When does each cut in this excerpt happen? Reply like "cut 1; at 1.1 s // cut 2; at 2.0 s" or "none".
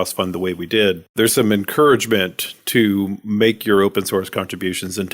cut 1; at 1.1 s